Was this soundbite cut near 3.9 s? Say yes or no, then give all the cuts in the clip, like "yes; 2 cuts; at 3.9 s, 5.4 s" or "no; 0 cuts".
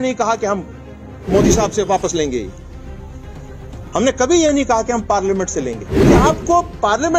yes; 3 cuts; at 2.5 s, 3.9 s, 5.9 s